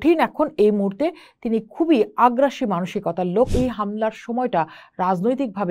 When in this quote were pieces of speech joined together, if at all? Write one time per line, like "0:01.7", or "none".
0:03.5

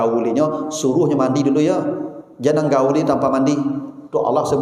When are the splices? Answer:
none

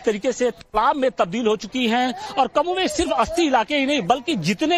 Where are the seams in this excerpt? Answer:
none

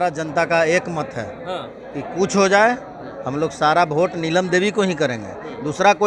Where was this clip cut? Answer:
none

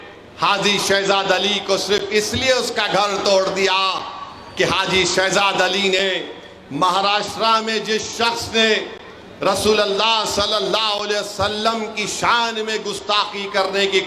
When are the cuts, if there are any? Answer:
none

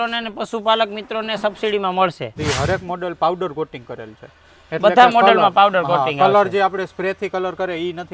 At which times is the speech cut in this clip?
0:02.4

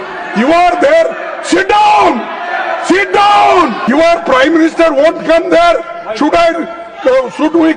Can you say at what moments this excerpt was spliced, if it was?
0:03.8

